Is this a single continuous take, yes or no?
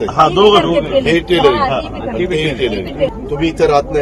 no